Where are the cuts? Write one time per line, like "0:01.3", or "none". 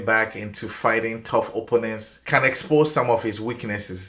0:02.1